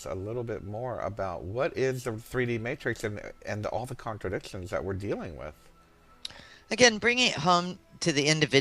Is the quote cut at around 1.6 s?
yes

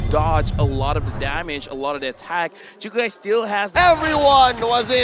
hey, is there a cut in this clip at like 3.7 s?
yes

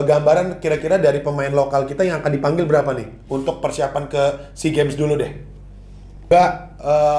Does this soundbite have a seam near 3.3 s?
no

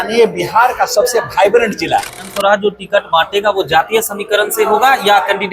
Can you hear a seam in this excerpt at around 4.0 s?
no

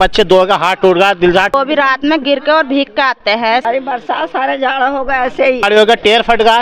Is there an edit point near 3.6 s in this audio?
yes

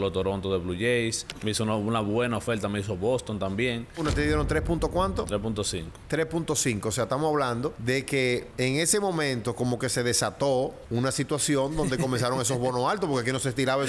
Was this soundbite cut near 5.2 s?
no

